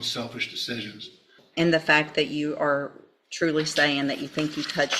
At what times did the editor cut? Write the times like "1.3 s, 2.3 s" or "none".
1.4 s